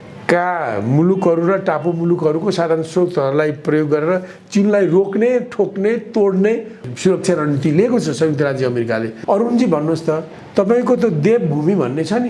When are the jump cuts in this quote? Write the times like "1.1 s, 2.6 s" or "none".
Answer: 6.8 s, 9.1 s